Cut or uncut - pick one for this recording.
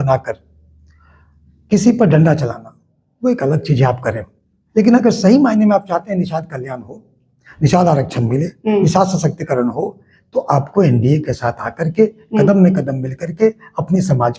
uncut